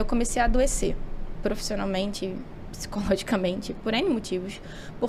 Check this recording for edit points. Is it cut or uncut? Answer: uncut